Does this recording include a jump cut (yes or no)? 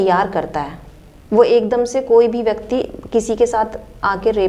no